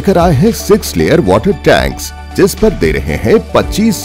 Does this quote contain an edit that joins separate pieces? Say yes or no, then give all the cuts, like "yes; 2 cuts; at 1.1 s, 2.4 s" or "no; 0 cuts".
no; 0 cuts